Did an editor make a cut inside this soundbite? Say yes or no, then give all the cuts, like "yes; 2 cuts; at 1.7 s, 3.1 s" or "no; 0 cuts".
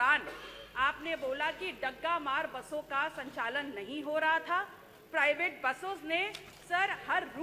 no; 0 cuts